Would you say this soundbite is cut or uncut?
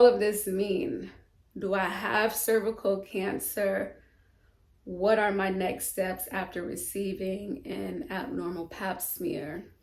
uncut